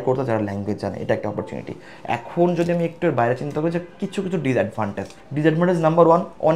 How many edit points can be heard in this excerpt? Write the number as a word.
zero